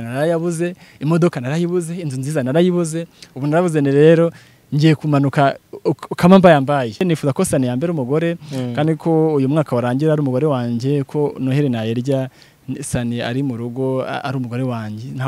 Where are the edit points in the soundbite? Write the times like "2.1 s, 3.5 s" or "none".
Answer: 7.0 s